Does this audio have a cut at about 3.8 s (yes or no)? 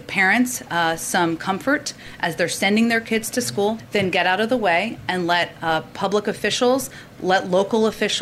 yes